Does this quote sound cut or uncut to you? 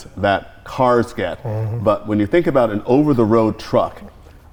uncut